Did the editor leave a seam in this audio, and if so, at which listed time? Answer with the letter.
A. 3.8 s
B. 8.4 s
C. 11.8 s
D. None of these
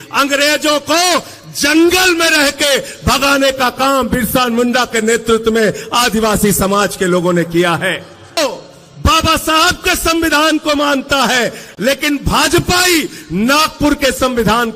B